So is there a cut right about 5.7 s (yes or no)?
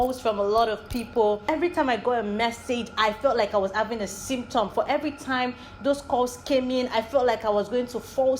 no